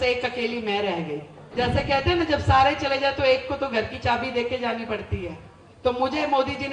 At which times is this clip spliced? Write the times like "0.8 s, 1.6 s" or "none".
1.4 s